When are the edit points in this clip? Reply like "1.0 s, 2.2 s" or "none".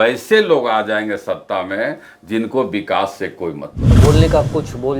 3.9 s